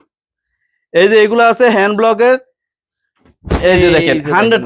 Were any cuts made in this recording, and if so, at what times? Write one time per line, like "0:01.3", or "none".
none